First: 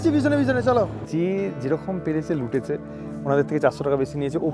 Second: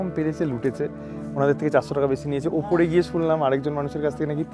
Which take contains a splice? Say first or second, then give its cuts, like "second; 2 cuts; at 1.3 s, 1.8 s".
first; 1 cut; at 0.9 s